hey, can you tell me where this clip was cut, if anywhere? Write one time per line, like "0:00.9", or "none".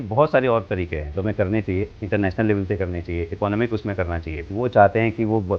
0:01.1
0:02.0
0:04.5